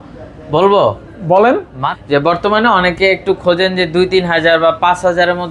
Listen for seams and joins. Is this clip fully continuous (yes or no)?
no